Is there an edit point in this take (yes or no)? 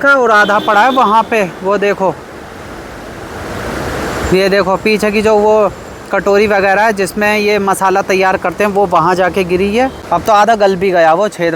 no